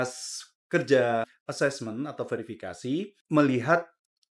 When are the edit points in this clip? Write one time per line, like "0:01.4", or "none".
0:01.3
0:03.2

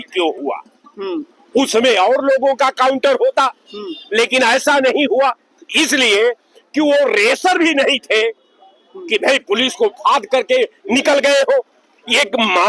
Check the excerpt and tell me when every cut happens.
none

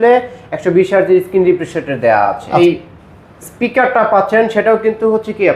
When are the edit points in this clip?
0:02.6

